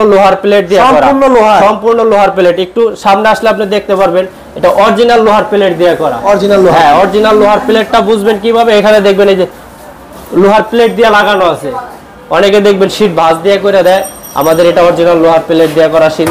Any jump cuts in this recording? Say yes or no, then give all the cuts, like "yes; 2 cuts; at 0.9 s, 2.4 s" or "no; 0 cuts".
no; 0 cuts